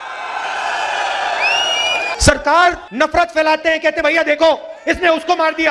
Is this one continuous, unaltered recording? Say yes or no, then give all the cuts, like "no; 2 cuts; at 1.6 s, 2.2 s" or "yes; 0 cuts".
no; 2 cuts; at 2.1 s, 2.9 s